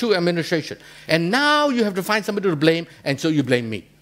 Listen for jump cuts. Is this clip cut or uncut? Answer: uncut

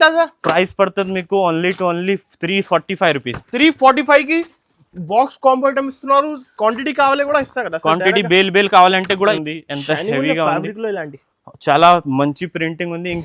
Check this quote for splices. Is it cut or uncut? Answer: cut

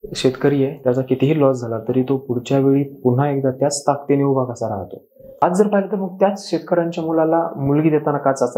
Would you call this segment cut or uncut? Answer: cut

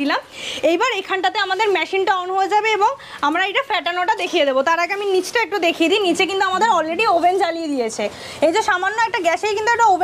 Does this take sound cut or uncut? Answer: uncut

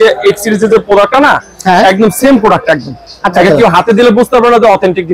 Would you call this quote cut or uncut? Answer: uncut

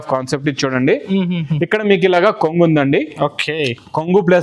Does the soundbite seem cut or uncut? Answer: uncut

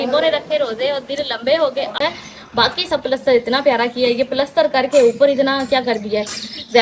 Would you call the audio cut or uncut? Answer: cut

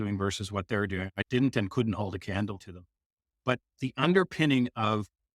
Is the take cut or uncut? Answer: cut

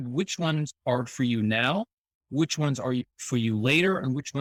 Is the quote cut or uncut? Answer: uncut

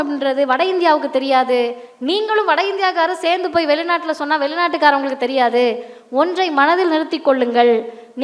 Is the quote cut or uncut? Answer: uncut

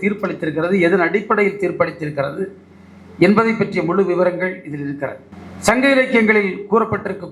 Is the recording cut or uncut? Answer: uncut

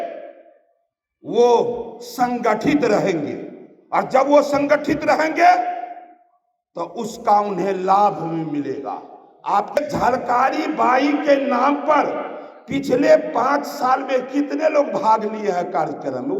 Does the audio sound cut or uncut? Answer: cut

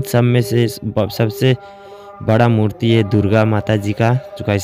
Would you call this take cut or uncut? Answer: uncut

